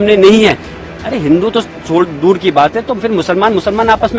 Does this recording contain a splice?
no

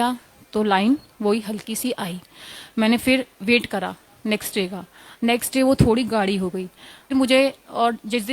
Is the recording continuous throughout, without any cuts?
no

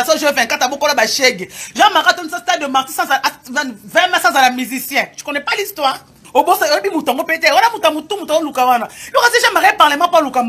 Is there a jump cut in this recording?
yes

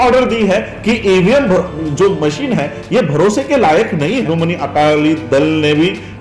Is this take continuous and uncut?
no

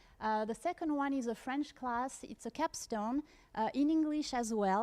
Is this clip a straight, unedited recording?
no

